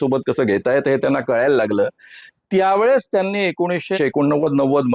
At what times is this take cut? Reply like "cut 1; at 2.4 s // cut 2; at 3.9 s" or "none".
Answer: cut 1; at 4.0 s

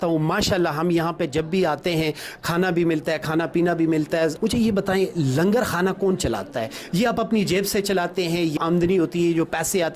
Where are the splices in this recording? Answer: cut 1; at 4.4 s // cut 2; at 8.6 s

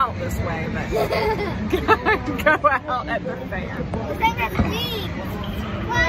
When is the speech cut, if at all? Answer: none

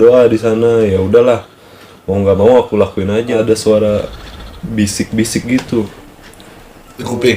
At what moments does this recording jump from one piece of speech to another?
cut 1; at 3.3 s

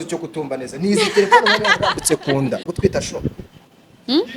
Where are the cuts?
cut 1; at 2.7 s

